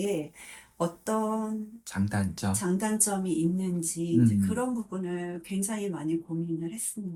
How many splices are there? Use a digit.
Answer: 0